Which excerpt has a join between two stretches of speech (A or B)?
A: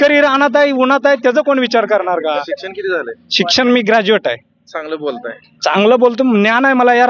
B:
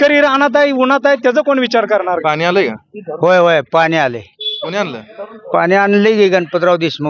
B